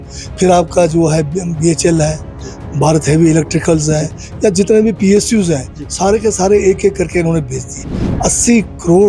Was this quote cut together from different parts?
yes; 1 cut; at 7.9 s

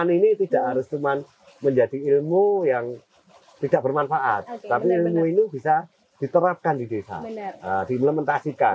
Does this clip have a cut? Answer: no; 0 cuts

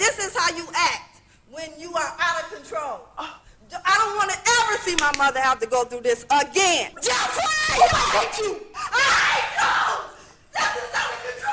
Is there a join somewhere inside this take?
yes; 2 cuts; at 6.9 s, 8.7 s

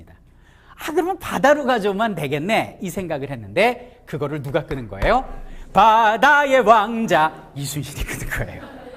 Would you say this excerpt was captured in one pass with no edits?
no; 1 cut; at 3.0 s

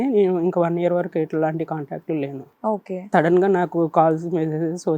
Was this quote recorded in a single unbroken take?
yes; 0 cuts

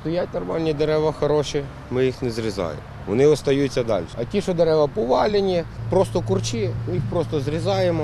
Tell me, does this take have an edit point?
yes; 3 cuts; at 4.2 s, 5.8 s, 6.8 s

